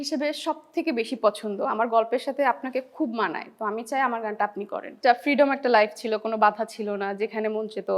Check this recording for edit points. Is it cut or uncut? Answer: cut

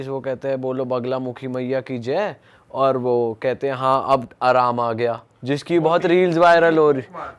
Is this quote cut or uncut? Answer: uncut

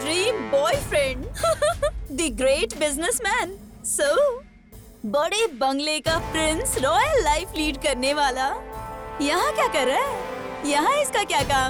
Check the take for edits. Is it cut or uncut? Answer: uncut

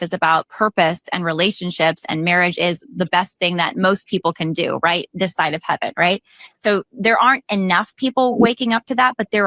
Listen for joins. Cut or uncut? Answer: uncut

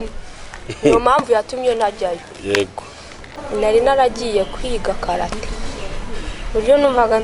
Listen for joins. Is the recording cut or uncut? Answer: cut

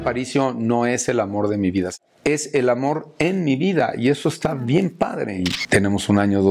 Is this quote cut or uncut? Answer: cut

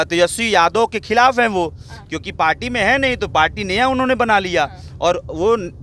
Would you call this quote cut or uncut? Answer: uncut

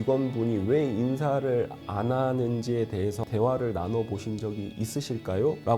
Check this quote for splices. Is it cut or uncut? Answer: uncut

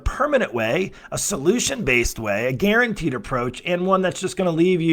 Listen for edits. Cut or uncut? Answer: uncut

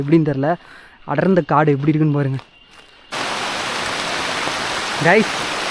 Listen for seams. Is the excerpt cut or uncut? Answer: cut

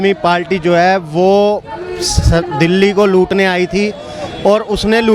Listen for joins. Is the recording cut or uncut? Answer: uncut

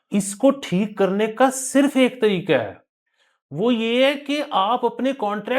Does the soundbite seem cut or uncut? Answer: uncut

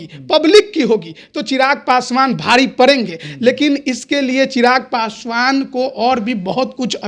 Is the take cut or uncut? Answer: uncut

